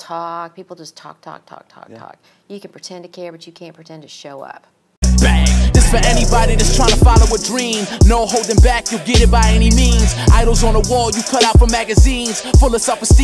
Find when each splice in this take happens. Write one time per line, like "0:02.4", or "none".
0:04.8